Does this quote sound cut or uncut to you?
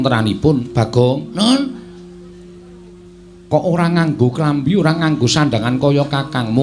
uncut